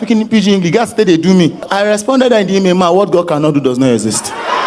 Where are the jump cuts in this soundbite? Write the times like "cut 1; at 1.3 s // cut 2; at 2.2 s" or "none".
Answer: cut 1; at 1.6 s